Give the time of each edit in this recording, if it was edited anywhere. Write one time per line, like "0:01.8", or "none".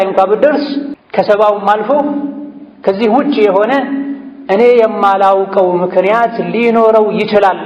0:00.9